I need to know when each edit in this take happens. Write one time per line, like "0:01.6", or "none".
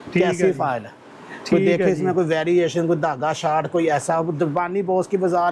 none